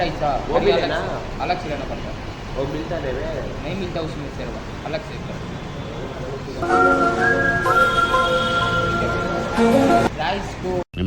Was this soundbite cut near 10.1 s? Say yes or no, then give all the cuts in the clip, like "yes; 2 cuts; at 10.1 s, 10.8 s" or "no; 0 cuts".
yes; 2 cuts; at 6.6 s, 10.1 s